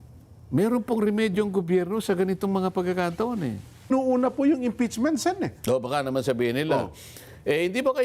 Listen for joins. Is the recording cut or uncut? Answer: cut